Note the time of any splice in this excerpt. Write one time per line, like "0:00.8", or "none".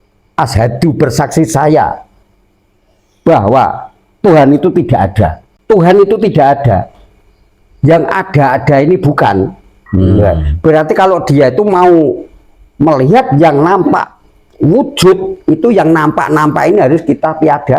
0:05.5